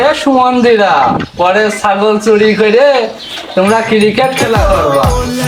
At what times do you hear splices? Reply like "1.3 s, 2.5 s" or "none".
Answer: none